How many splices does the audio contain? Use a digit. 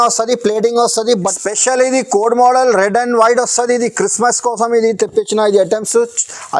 1